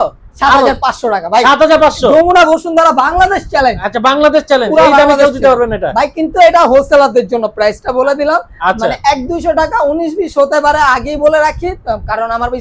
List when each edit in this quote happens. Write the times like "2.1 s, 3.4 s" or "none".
none